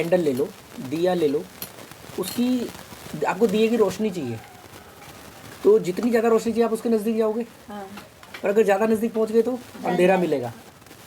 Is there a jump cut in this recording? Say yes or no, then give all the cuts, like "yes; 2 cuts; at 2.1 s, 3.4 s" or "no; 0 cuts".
no; 0 cuts